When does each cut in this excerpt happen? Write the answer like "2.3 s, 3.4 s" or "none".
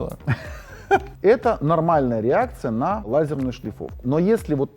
1.1 s, 3.1 s